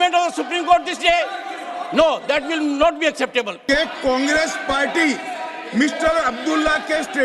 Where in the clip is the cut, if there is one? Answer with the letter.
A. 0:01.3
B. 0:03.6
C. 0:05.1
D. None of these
B